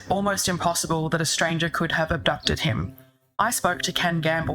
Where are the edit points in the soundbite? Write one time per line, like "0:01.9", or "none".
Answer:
0:03.3